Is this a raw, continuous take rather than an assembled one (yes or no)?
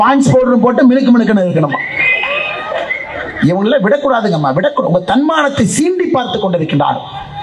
yes